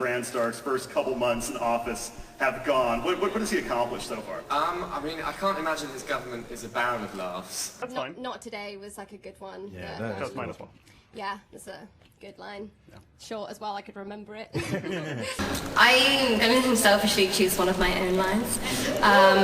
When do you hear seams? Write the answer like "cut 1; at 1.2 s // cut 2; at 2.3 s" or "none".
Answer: cut 1; at 7.8 s // cut 2; at 15.4 s